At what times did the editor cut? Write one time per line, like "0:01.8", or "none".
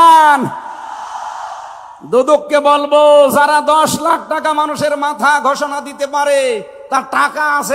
none